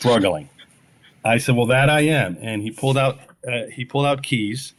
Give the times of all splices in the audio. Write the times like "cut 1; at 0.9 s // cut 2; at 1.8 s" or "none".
none